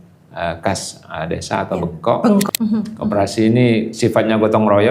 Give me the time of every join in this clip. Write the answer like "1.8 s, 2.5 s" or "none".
2.5 s